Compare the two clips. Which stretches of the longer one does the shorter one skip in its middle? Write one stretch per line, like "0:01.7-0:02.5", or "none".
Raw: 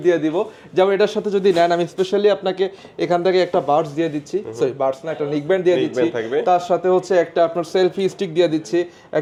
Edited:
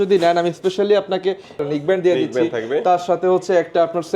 0:02.8-0:05.1